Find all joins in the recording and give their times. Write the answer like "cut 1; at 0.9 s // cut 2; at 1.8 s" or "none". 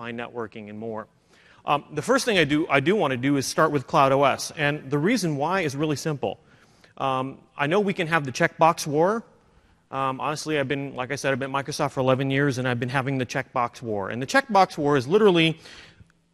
cut 1; at 4.1 s